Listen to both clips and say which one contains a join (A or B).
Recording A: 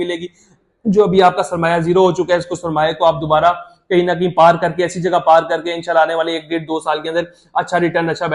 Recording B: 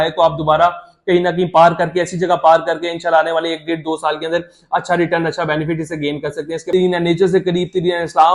B